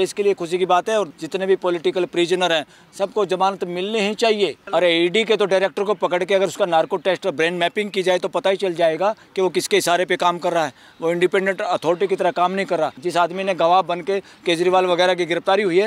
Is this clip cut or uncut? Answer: cut